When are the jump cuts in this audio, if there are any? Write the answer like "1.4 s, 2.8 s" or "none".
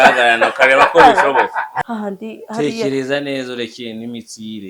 1.6 s